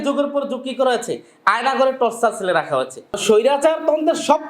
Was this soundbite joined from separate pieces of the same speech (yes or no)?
yes